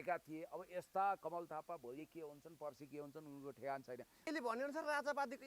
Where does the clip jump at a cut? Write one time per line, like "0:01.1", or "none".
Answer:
0:04.3

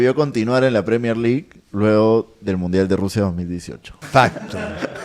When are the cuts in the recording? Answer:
0:04.0

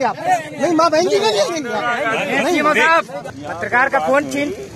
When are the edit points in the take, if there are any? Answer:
0:03.2

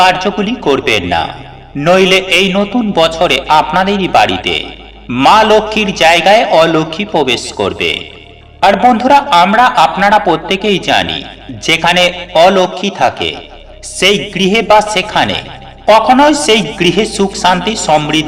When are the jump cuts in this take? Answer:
none

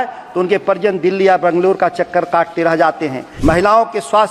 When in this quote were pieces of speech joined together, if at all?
0:03.2

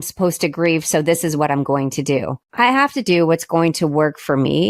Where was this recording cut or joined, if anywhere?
0:02.4

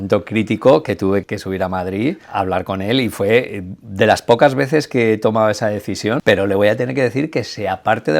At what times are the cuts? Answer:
0:01.2
0:02.2
0:06.2

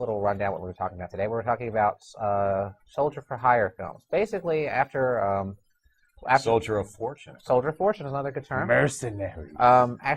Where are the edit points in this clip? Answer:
0:07.1

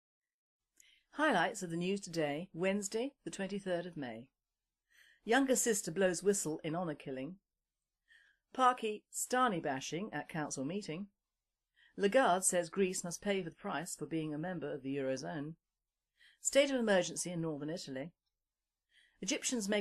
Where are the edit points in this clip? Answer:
0:06.5

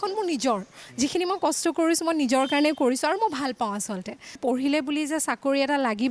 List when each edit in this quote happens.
0:04.4

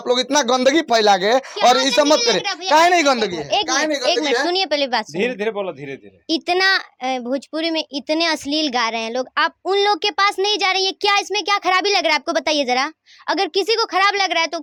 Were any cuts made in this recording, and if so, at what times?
none

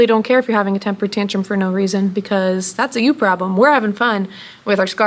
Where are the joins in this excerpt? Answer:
none

